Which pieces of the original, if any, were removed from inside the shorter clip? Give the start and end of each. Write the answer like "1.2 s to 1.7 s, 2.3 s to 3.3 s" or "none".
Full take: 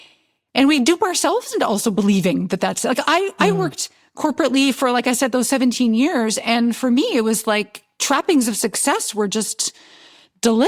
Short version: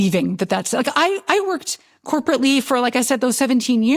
none

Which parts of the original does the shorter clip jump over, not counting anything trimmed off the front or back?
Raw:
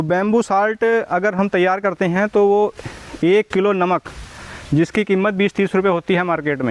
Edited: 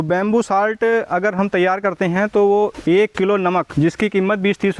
2.8 s to 3.1 s, 4.0 s to 4.6 s

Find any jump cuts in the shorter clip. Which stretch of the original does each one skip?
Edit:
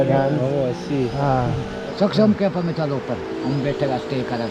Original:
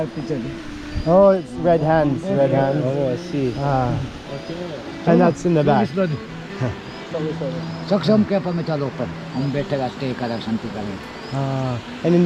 4.3 s to 7.7 s

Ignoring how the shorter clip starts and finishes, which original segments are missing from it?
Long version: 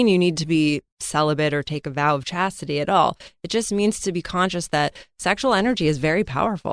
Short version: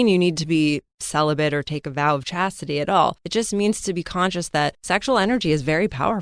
3.2 s to 3.4 s, 5.0 s to 5.1 s

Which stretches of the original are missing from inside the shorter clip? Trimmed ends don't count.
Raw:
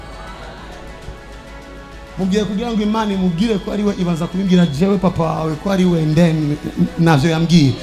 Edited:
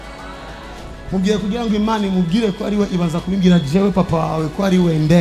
1.0 s to 2.0 s

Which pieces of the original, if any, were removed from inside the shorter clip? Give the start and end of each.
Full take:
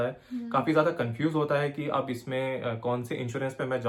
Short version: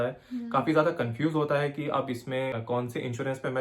2.5 s to 2.7 s

